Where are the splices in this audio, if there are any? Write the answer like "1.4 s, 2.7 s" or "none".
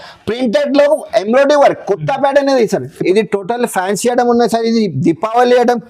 3.0 s